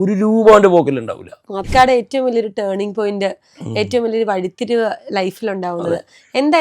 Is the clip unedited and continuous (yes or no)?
no